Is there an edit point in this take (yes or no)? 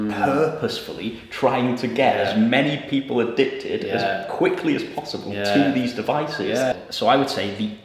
yes